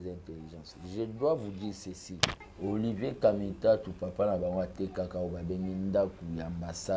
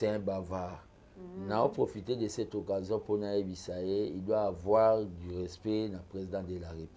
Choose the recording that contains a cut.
first; 1 cut; at 2.5 s

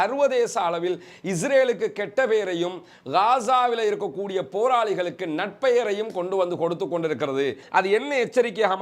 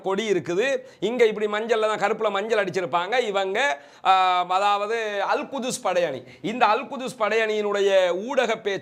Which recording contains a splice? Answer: first; 1 cut; at 7.6 s

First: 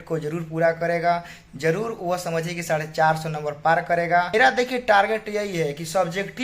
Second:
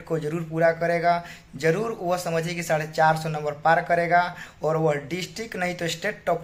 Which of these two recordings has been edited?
first; 1 cut; at 4.3 s

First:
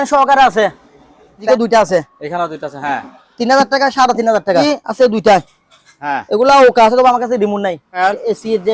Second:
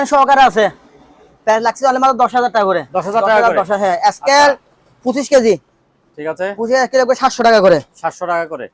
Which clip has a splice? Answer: first; 3 cuts; at 1.4 s, 4.6 s, 7.9 s

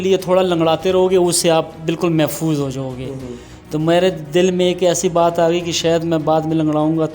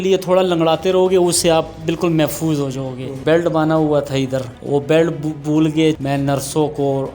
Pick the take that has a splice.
second; 3 cuts; at 3.2 s, 4.5 s, 6.0 s

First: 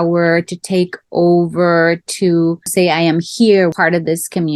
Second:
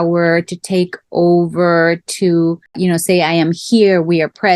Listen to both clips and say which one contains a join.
first; 2 cuts; at 2.7 s, 3.7 s

